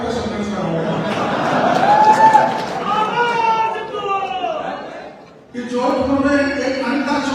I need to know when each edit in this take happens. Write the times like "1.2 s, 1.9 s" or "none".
4.8 s